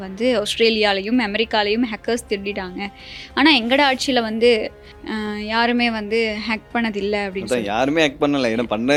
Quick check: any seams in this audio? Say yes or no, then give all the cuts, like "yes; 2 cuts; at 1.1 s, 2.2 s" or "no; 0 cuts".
no; 0 cuts